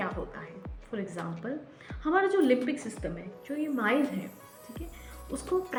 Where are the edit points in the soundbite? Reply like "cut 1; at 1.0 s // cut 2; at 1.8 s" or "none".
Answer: none

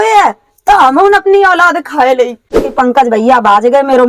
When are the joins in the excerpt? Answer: cut 1; at 2.6 s

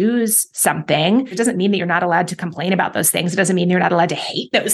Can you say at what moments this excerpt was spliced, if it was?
cut 1; at 1.3 s

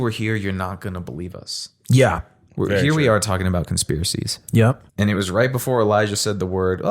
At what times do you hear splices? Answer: cut 1; at 4.8 s

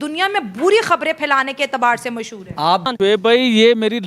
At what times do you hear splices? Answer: cut 1; at 2.8 s

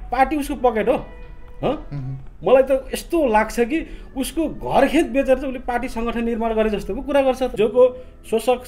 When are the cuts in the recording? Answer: cut 1; at 7.5 s

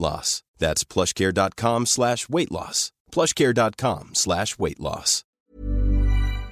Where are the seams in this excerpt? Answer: cut 1; at 5.4 s

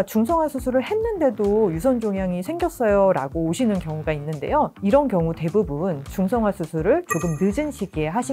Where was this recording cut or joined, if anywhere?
none

